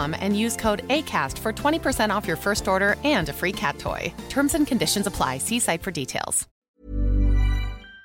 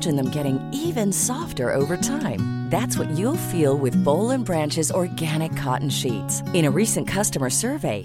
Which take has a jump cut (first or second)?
first